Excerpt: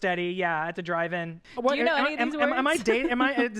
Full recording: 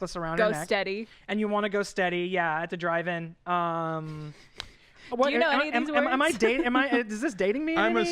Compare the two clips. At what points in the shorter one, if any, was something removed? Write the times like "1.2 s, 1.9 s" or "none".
1.4 s